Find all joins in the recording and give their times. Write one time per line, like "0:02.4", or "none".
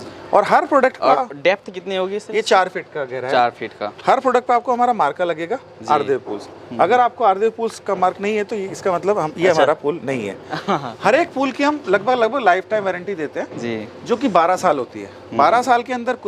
none